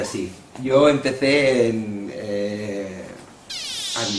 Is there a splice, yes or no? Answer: no